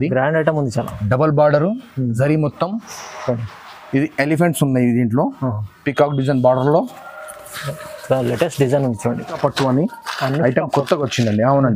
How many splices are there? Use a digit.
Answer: 1